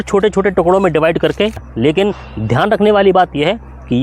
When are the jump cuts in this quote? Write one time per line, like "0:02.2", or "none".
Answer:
0:01.7